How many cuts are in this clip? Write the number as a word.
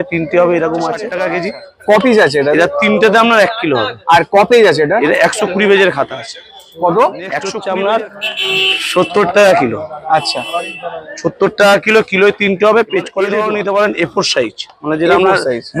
three